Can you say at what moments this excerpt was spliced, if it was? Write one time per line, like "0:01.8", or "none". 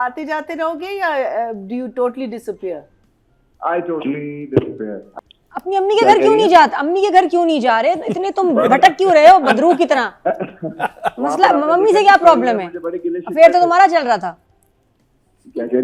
0:05.1